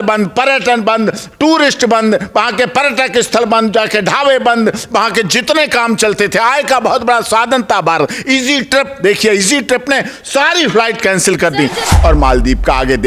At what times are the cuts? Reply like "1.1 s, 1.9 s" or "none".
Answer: 11.9 s